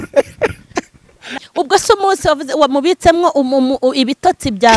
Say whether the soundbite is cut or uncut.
cut